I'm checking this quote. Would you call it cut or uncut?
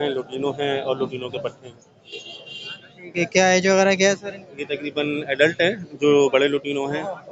uncut